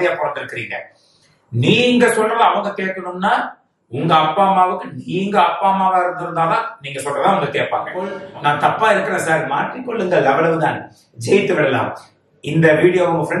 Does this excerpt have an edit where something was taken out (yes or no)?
yes